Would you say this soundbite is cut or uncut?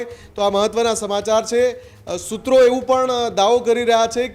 uncut